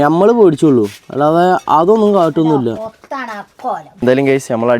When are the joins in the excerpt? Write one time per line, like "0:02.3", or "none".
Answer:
0:03.9